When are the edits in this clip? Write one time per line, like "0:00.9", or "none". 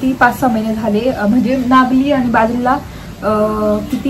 none